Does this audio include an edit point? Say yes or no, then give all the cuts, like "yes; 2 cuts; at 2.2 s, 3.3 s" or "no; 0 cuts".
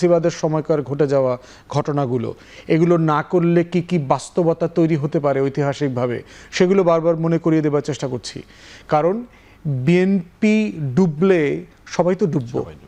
no; 0 cuts